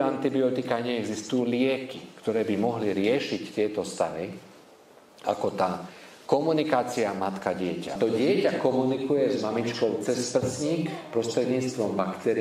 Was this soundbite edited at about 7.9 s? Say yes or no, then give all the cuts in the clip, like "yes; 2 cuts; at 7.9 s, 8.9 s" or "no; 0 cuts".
yes; 1 cut; at 7.9 s